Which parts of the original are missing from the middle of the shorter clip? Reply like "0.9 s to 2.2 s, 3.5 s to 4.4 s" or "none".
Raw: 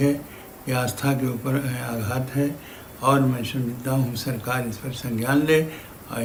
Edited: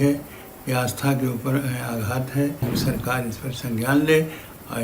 2.7 s to 4.1 s